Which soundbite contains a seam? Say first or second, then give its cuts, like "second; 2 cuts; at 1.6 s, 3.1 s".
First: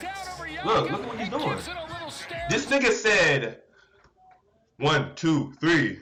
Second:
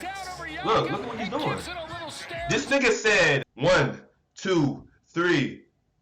second; 1 cut; at 3.5 s